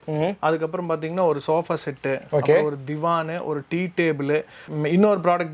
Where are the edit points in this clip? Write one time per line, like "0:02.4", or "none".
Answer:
none